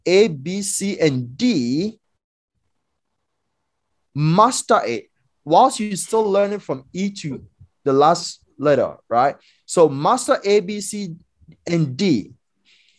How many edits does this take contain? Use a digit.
0